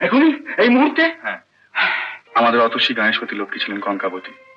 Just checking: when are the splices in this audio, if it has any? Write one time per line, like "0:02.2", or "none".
0:02.1